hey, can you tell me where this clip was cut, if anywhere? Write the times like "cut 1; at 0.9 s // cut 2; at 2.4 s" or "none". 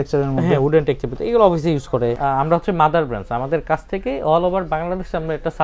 cut 1; at 2.2 s